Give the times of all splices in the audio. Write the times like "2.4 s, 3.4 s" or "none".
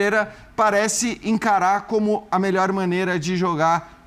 none